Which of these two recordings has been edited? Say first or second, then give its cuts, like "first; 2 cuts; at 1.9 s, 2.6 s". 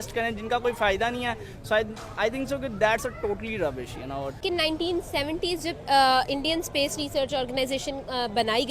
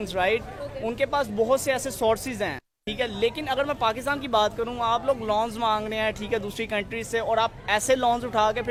first; 1 cut; at 4.4 s